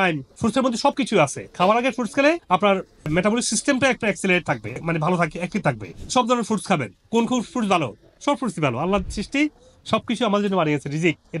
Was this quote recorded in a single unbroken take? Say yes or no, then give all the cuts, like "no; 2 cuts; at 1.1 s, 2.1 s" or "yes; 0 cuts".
yes; 0 cuts